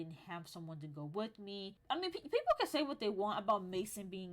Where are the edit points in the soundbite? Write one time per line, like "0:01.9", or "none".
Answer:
0:01.8